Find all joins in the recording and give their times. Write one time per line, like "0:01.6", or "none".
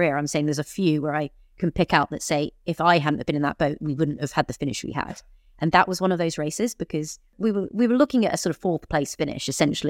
0:07.3